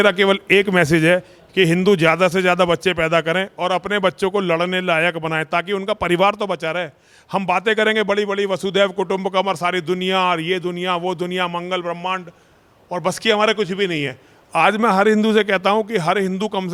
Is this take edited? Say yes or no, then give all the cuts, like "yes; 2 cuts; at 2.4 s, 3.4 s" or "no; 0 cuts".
no; 0 cuts